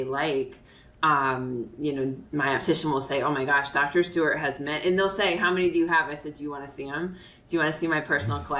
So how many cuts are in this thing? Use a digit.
0